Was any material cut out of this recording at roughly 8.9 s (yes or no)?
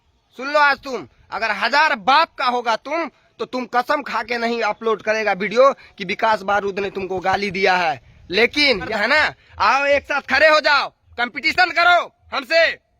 yes